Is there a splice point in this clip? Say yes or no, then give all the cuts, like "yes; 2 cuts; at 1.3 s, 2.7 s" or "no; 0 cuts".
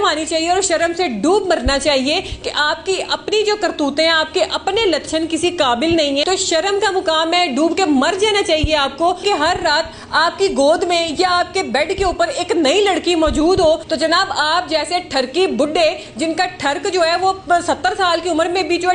yes; 3 cuts; at 6.2 s, 9.2 s, 13.9 s